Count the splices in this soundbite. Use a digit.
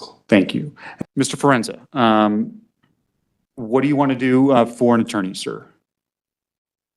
1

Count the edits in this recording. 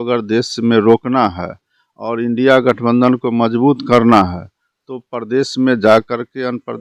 0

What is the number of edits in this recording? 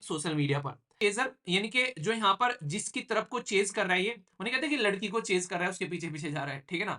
1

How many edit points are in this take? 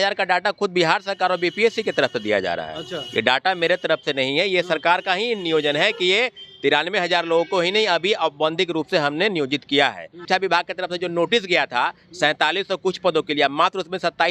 1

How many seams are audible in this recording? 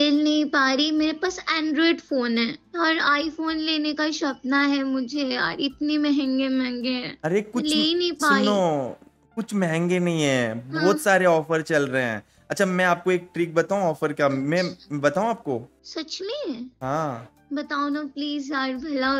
2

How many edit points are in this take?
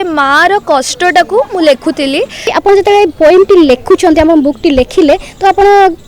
1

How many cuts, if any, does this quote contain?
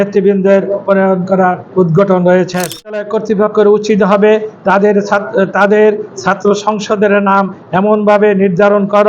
1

